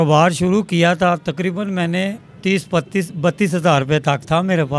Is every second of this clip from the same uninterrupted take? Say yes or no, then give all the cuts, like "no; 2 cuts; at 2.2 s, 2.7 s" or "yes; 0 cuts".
yes; 0 cuts